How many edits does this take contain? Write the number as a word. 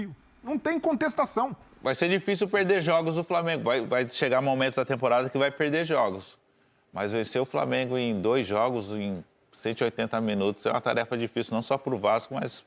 one